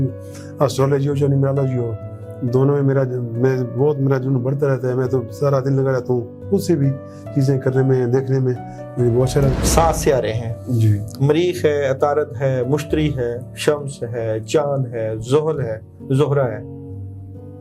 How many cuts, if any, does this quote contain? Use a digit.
1